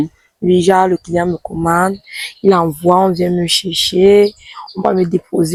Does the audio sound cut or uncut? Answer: uncut